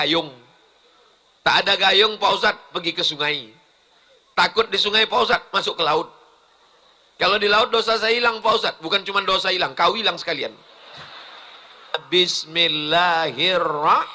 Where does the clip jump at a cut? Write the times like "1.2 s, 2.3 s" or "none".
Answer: 11.9 s